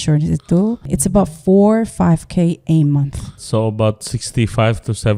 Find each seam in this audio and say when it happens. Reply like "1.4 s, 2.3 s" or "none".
0.9 s, 3.4 s